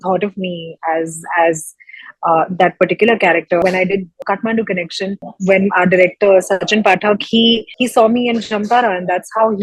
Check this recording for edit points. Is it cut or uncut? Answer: cut